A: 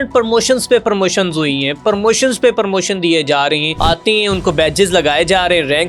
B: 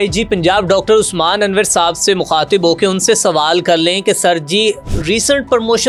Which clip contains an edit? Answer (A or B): A